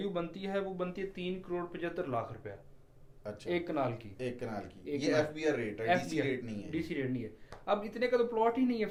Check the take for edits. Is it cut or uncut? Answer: uncut